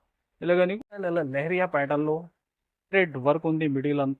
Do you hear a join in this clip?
yes; 1 cut; at 1.0 s

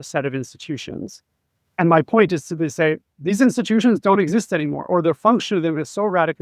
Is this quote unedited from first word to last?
yes; 0 cuts

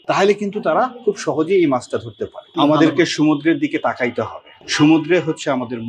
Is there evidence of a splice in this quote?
yes; 1 cut; at 2.5 s

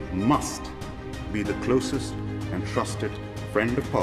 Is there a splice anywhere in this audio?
no; 0 cuts

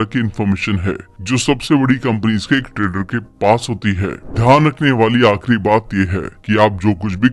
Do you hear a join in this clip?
yes; 1 cut; at 4.2 s

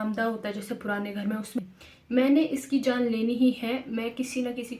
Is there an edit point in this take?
yes; 1 cut; at 1.6 s

